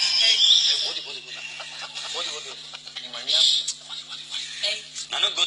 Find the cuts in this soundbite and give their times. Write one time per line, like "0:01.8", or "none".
0:03.4